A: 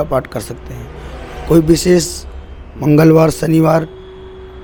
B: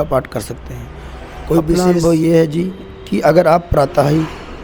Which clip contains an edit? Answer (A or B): B